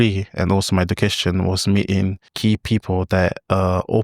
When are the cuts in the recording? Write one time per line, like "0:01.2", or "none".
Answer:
0:02.2